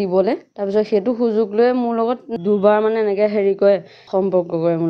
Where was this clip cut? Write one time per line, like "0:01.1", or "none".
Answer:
0:02.3
0:03.9